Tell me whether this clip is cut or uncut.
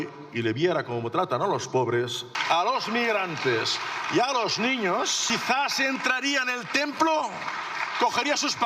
cut